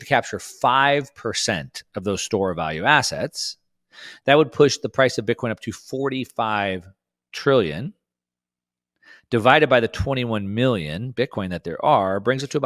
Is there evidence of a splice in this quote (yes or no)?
no